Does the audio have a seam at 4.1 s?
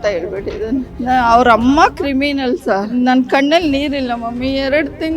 no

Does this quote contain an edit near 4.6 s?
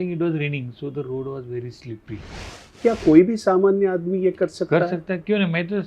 no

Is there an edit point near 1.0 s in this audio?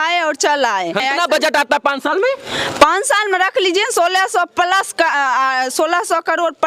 yes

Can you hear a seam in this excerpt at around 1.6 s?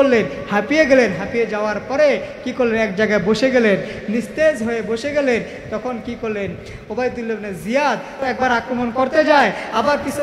no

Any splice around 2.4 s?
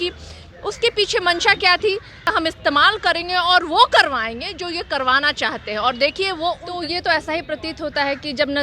yes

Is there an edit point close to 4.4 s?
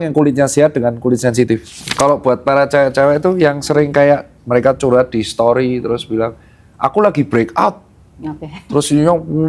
no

